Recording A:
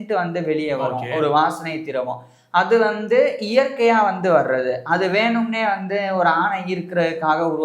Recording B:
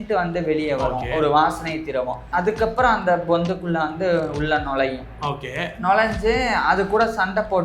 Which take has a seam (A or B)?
B